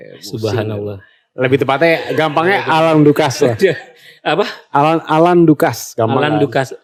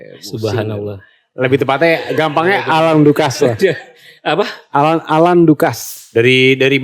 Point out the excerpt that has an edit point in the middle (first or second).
second